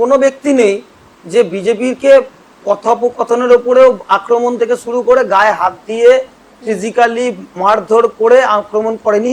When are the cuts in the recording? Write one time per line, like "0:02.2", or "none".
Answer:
none

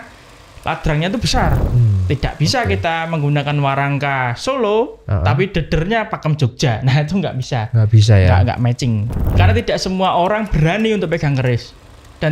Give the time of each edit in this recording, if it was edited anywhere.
0:01.7
0:09.2

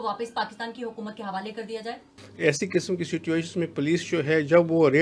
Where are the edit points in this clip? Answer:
0:02.1

